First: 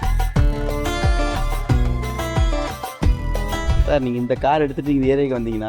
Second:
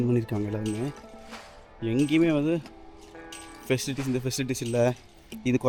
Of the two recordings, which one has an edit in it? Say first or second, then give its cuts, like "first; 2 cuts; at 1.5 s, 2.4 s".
first; 1 cut; at 3.8 s